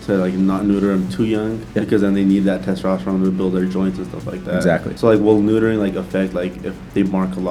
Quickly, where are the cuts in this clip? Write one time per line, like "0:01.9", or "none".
0:01.6
0:04.9